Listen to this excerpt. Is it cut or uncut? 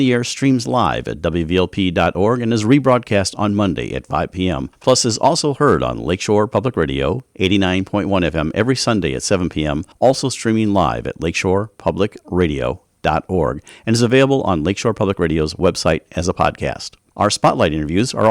cut